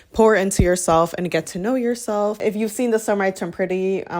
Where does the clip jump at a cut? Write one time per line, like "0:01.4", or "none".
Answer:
0:02.4